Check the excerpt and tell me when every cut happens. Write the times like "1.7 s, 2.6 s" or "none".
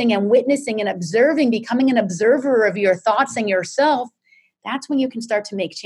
none